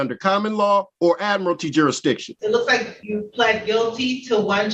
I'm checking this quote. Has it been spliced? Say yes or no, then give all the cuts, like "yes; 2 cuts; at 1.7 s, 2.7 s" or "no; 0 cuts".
yes; 3 cuts; at 0.9 s, 2.3 s, 3.0 s